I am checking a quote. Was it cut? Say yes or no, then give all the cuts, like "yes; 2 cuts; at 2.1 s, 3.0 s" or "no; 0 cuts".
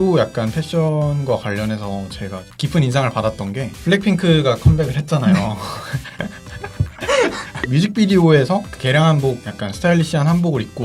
yes; 1 cut; at 7.6 s